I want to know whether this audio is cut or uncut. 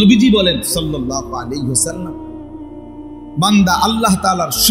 cut